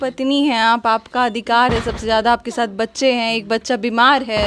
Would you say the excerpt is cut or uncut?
uncut